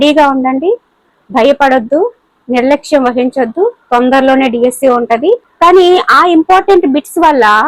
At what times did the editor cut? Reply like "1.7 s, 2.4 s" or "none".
5.5 s